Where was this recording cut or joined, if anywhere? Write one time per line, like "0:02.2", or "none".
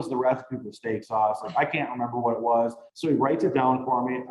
0:02.9